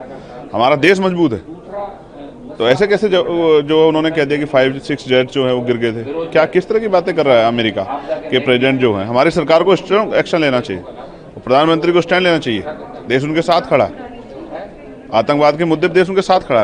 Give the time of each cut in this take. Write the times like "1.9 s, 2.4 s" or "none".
none